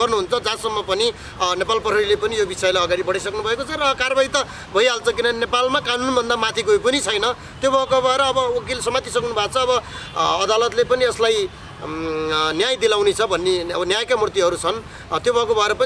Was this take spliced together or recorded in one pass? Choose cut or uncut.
uncut